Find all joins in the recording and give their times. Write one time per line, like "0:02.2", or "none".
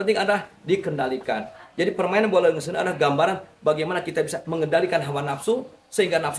none